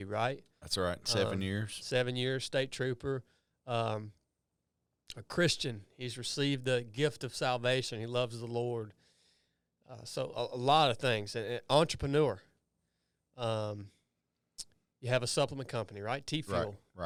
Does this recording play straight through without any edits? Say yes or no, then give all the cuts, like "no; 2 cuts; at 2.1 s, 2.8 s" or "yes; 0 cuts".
yes; 0 cuts